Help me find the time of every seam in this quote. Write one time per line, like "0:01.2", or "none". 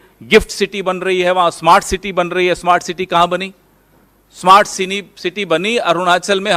none